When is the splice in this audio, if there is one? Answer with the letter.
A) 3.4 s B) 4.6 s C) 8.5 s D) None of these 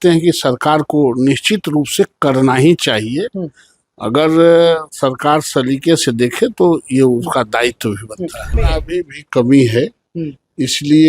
C